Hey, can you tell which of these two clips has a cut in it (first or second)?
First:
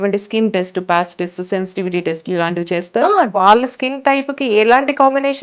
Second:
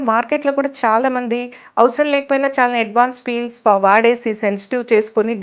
first